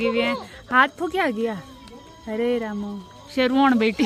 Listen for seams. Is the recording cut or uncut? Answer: uncut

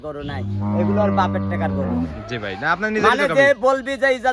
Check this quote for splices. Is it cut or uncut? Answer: uncut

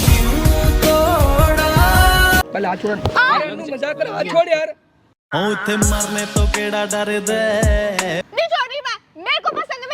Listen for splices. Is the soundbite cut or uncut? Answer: cut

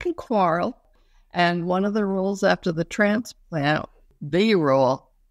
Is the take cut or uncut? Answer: cut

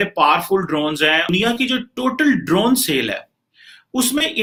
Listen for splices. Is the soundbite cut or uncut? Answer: uncut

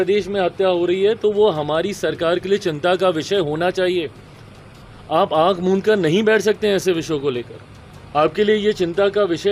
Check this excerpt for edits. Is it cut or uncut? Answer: uncut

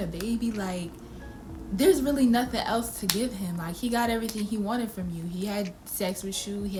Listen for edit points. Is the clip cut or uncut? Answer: uncut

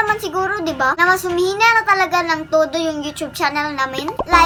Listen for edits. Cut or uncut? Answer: uncut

